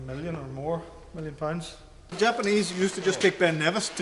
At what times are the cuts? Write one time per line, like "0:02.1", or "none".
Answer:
0:02.1